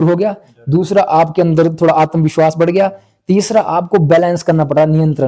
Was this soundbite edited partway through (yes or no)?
no